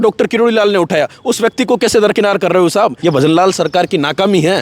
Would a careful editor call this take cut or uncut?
cut